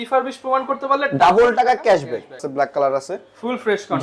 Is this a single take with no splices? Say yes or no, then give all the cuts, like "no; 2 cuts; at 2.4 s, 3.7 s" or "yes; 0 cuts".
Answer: no; 1 cut; at 2.5 s